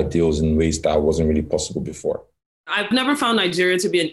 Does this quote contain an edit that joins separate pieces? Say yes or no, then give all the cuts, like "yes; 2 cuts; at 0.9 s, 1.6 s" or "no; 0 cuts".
yes; 1 cut; at 2.8 s